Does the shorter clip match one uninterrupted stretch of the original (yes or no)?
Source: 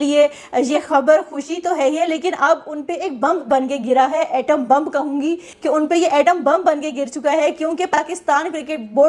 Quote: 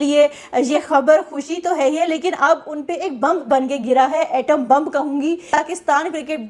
no